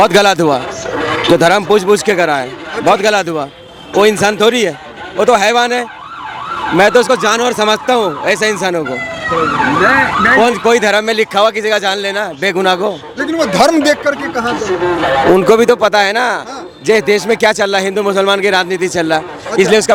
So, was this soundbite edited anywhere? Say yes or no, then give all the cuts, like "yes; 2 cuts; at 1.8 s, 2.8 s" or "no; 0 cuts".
no; 0 cuts